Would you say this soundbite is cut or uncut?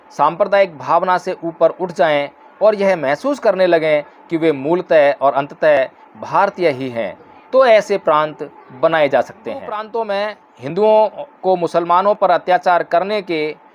cut